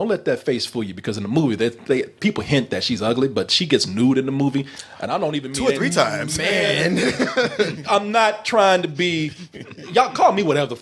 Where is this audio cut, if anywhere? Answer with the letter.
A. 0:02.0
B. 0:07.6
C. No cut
C